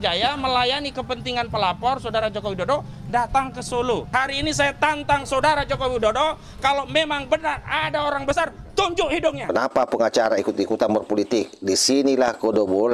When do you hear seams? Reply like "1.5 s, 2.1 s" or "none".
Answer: 9.5 s